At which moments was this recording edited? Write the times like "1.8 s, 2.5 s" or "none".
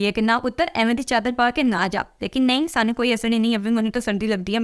none

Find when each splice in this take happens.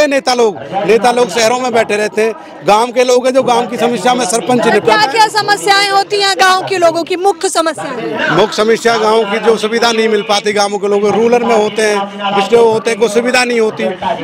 none

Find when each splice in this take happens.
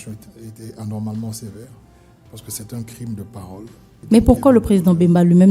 4.0 s

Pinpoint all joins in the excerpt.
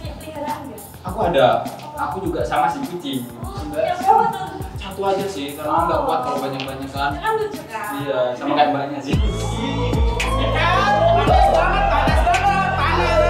none

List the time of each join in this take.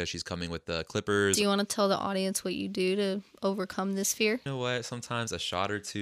1.4 s, 4.5 s

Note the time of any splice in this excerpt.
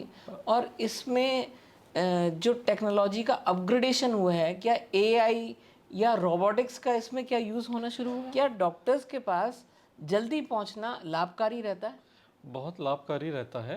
8.3 s

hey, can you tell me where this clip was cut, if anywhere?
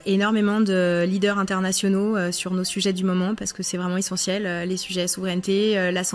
none

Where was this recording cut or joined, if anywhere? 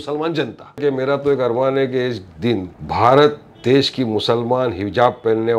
0.8 s, 2.8 s

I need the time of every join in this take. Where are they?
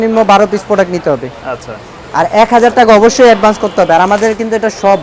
none

